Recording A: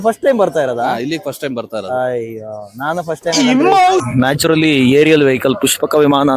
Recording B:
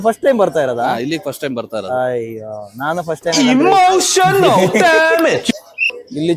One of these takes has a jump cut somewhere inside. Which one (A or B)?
A